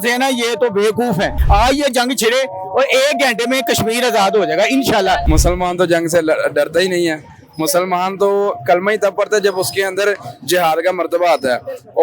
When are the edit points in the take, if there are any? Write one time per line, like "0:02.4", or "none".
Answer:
0:01.4
0:05.2